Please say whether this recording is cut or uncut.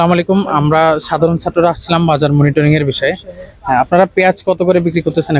uncut